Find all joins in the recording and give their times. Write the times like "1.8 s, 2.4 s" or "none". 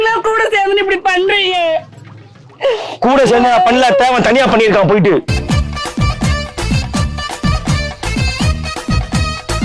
none